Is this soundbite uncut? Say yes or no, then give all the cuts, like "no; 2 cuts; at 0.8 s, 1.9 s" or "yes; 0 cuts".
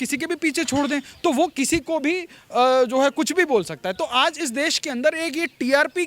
yes; 0 cuts